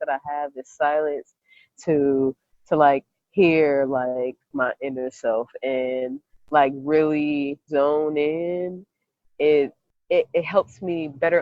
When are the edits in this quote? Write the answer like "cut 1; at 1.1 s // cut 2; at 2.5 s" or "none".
cut 1; at 4.5 s // cut 2; at 7.6 s // cut 3; at 9.9 s

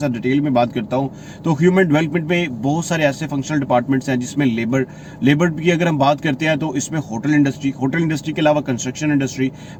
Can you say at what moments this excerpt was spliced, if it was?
none

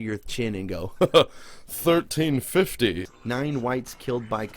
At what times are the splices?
cut 1; at 3.1 s

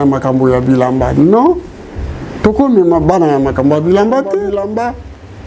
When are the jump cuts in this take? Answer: cut 1; at 4.5 s

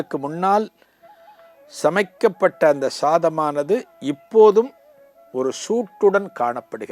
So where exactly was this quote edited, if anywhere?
none

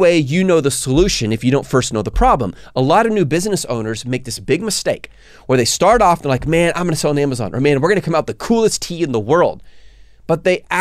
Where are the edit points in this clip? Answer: none

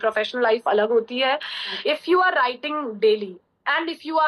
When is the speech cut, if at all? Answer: cut 1; at 1.7 s

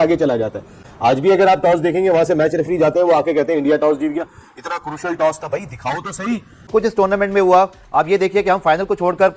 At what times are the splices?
cut 1; at 6.6 s

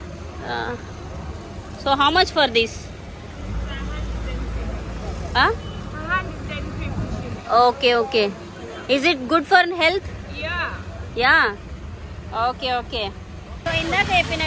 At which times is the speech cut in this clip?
none

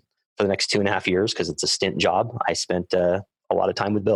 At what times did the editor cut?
none

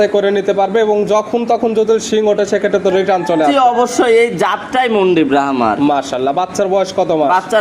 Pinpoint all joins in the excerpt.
none

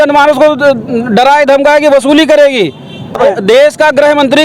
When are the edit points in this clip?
cut 1; at 3.2 s

